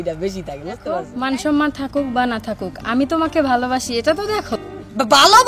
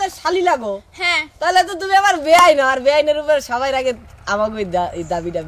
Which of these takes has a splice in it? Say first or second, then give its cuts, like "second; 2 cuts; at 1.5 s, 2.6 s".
first; 1 cut; at 1.1 s